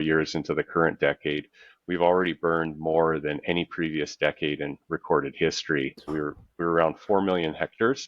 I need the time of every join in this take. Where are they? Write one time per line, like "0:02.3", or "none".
0:06.1

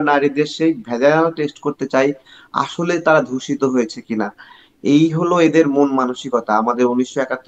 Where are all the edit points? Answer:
none

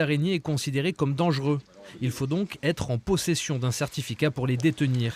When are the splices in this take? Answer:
0:02.2

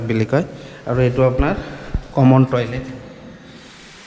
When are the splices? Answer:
none

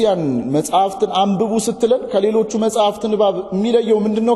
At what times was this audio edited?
none

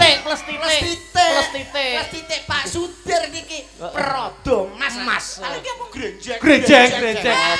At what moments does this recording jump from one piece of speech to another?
none

